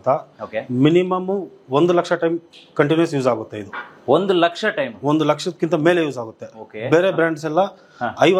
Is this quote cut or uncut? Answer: uncut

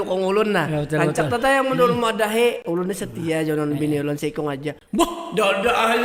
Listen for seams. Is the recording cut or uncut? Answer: uncut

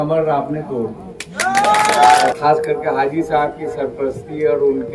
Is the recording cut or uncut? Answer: cut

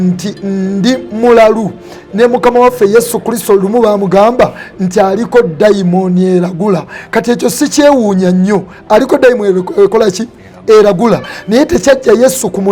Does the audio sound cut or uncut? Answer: uncut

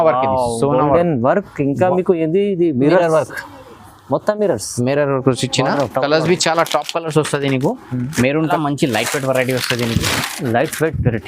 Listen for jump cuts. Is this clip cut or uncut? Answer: cut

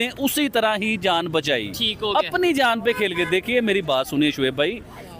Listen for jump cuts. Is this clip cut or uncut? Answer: uncut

